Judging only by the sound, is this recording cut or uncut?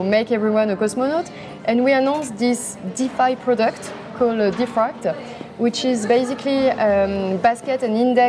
uncut